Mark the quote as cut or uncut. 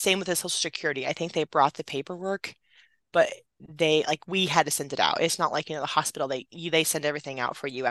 uncut